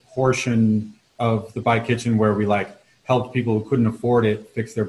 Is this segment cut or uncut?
cut